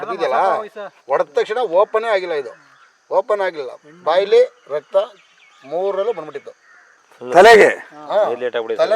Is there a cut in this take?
no; 0 cuts

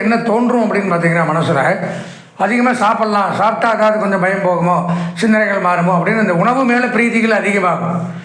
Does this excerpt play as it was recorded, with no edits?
yes; 0 cuts

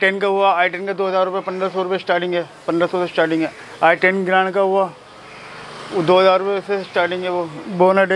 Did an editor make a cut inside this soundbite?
no; 0 cuts

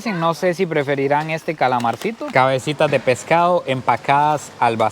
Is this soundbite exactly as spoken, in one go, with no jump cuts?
no; 1 cut; at 2.3 s

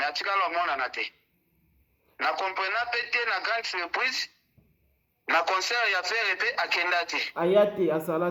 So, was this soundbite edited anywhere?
no; 0 cuts

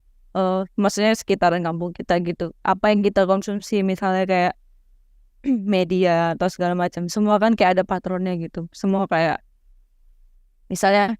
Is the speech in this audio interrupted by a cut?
no; 0 cuts

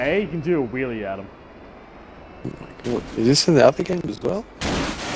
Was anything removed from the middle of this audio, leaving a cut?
no; 0 cuts

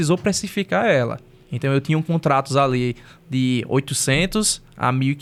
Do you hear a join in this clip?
no; 0 cuts

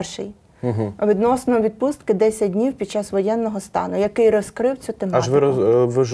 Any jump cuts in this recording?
no; 0 cuts

